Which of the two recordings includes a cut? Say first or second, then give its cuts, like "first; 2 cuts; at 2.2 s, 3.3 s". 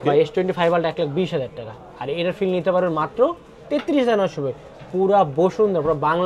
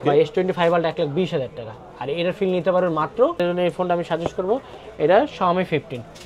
second; 1 cut; at 3.4 s